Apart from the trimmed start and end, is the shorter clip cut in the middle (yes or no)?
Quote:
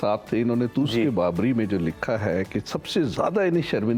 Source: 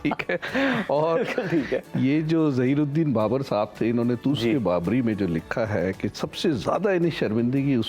no